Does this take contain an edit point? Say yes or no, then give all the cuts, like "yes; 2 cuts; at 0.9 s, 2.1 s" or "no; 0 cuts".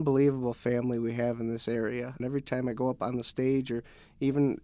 yes; 1 cut; at 2.2 s